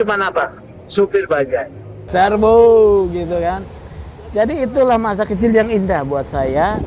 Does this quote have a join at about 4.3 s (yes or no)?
no